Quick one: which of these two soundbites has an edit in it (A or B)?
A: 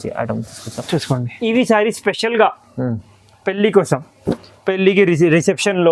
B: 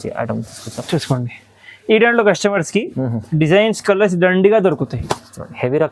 A